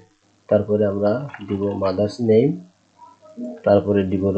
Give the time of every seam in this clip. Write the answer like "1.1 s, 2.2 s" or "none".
none